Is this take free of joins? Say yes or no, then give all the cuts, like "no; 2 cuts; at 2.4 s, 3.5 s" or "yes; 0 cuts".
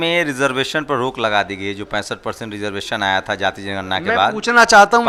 yes; 0 cuts